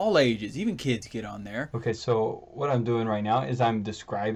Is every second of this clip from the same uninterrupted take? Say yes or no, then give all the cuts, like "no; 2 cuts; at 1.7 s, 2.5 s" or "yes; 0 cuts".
yes; 0 cuts